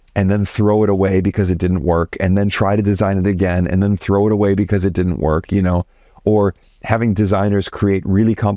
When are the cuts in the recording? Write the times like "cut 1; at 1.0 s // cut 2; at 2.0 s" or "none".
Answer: none